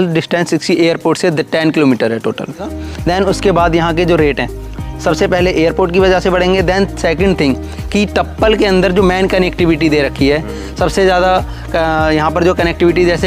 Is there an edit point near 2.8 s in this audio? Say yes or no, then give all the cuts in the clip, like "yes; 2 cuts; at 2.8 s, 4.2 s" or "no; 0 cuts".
yes; 1 cut; at 2.8 s